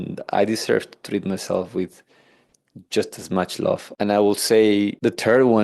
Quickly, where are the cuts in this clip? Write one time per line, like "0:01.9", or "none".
none

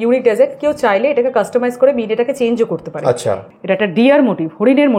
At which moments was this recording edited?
0:03.5

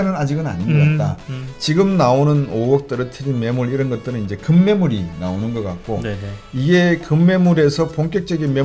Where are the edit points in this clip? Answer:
none

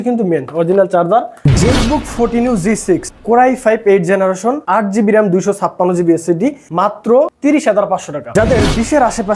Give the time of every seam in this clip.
0:01.3
0:03.1
0:04.6
0:06.7
0:08.2

